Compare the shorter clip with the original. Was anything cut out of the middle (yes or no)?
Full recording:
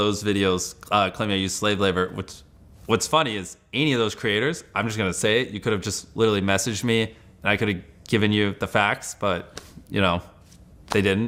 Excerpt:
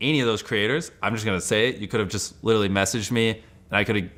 no